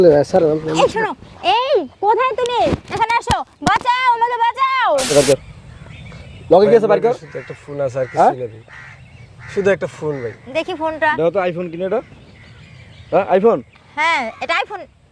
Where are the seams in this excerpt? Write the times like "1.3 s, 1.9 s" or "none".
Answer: 5.1 s

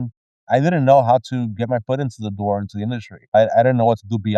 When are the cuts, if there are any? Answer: none

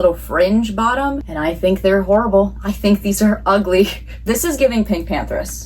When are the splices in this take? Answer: 4.2 s

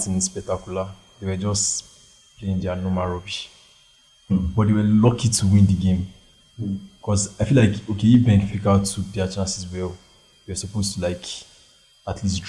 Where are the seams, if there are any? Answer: none

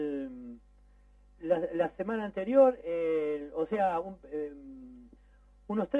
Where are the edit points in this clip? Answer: 2.0 s

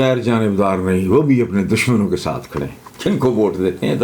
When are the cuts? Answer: 2.8 s

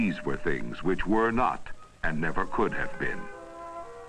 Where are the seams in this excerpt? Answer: none

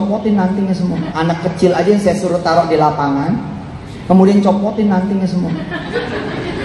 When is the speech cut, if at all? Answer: 1.1 s

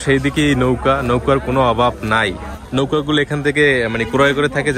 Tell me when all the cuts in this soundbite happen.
2.6 s

